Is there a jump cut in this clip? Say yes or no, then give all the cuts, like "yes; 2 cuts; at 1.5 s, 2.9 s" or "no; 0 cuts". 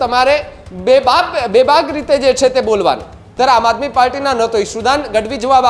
yes; 1 cut; at 3.2 s